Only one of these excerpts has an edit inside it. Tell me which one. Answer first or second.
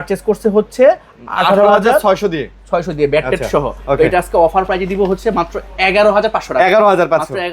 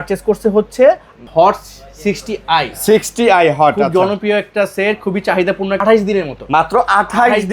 second